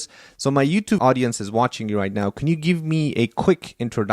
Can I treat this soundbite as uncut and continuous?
no; 1 cut; at 1.0 s

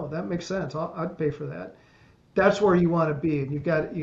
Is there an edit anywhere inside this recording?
no; 0 cuts

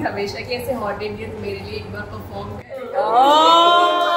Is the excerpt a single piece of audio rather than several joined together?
yes; 0 cuts

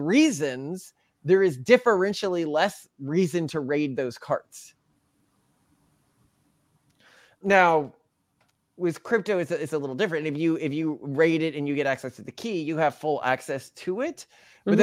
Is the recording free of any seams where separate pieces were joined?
yes; 0 cuts

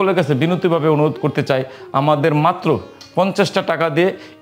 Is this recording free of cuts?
yes; 0 cuts

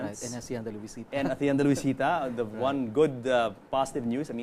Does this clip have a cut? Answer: yes; 1 cut; at 2.0 s

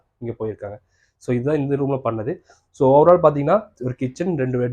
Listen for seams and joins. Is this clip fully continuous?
yes; 0 cuts

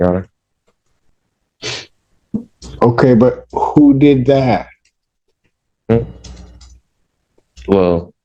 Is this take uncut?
yes; 0 cuts

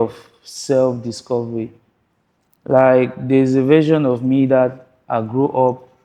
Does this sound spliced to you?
no; 0 cuts

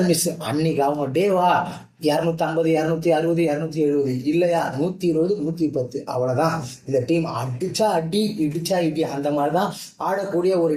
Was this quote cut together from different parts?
no; 0 cuts

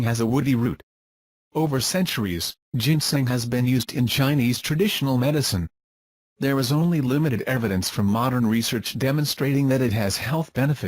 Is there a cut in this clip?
yes; 1 cut; at 2.8 s

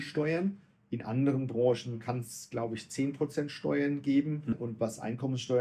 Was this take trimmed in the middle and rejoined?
yes; 1 cut; at 4.6 s

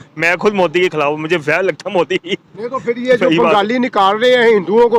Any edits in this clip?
no; 0 cuts

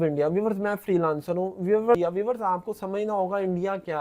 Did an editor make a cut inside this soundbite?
yes; 1 cut; at 2.0 s

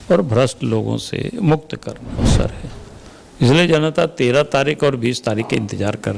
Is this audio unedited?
no; 1 cut; at 2.3 s

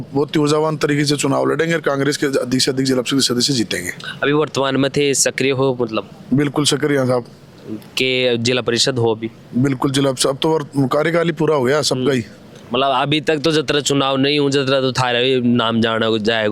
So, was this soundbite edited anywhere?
no; 0 cuts

